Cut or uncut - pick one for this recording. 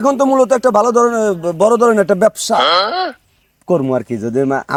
uncut